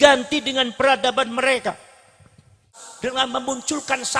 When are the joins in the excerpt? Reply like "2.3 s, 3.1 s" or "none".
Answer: none